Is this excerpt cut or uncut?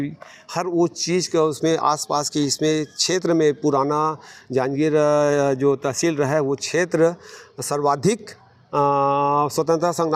uncut